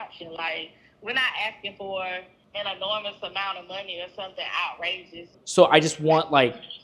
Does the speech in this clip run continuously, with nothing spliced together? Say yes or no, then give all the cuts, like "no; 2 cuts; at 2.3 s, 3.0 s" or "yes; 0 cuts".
no; 2 cuts; at 2.4 s, 5.2 s